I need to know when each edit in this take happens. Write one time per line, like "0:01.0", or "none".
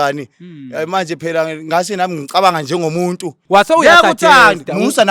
0:03.3